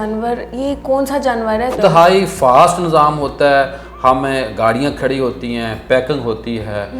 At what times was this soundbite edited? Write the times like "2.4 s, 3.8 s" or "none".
1.8 s